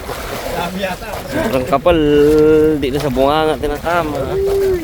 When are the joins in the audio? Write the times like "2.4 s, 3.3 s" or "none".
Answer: none